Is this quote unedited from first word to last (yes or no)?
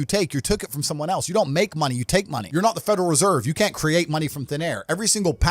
no